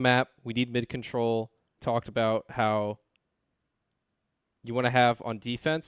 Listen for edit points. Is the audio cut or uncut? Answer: uncut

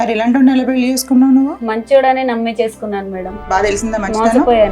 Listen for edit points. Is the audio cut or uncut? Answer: cut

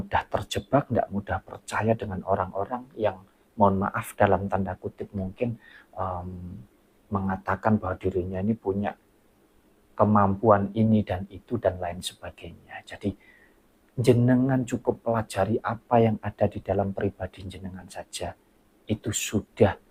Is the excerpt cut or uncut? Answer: uncut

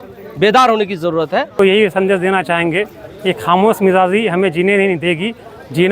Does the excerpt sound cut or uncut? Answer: cut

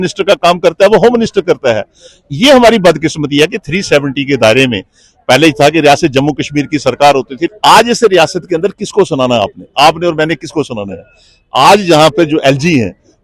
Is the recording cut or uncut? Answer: cut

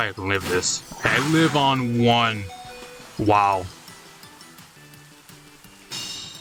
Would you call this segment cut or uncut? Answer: uncut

